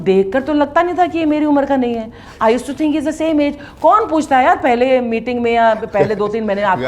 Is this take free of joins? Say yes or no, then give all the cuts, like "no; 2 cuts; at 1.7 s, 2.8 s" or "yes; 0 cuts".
yes; 0 cuts